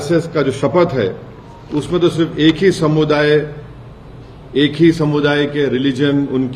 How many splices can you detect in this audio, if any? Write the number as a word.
zero